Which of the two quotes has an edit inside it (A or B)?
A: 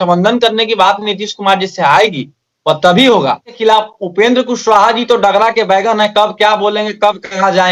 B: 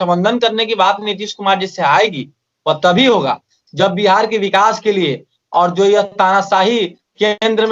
A